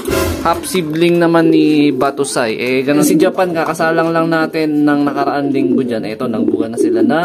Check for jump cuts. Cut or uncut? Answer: cut